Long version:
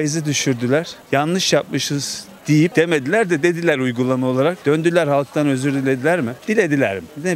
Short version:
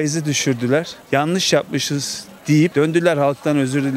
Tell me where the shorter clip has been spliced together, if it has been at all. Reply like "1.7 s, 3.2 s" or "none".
2.7 s